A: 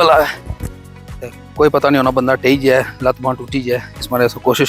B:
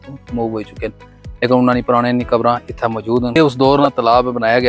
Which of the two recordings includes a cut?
B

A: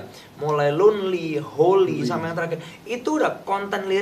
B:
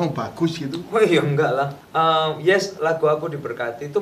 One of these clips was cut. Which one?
B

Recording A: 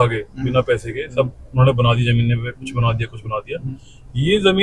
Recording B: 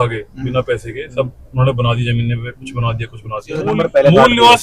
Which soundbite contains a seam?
B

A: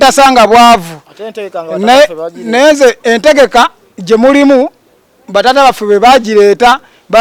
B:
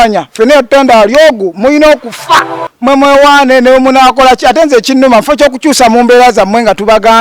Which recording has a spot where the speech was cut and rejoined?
B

